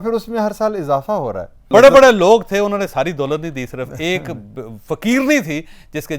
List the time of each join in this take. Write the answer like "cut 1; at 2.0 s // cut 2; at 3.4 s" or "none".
cut 1; at 1.7 s